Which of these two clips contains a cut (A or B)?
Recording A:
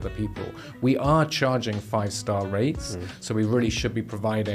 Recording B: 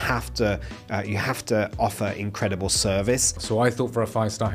B